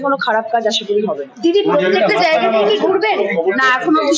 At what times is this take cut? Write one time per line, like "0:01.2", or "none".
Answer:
none